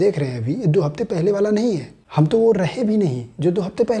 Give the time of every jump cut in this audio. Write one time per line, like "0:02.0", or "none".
0:02.0